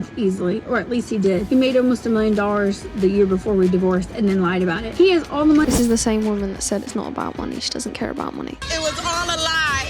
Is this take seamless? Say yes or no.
no